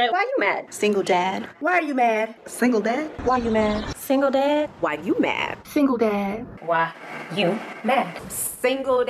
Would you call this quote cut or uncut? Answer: uncut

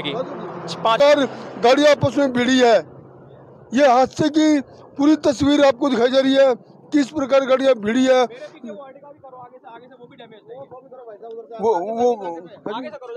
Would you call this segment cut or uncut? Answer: cut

